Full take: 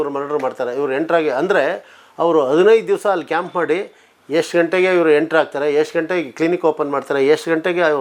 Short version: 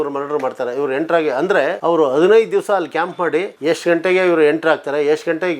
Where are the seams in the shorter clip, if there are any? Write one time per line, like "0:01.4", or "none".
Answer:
0:01.8
0:03.5